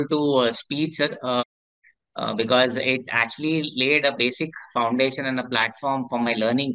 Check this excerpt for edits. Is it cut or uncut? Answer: uncut